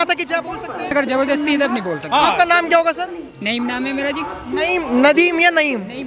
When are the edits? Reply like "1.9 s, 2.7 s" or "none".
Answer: 0.9 s